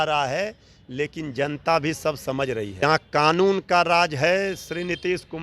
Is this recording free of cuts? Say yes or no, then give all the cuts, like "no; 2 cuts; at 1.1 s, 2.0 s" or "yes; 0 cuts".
no; 1 cut; at 2.8 s